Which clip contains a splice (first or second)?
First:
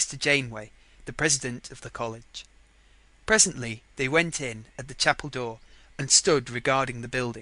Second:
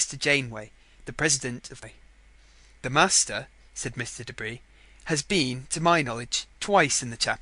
first